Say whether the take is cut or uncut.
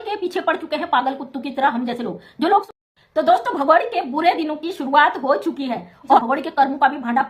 cut